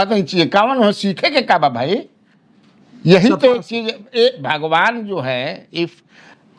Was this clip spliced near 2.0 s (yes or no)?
no